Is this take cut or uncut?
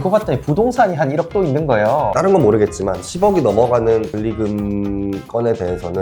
cut